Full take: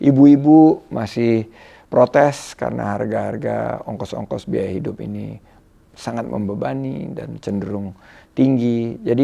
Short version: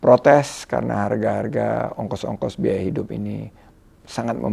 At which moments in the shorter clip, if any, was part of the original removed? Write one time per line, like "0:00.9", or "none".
none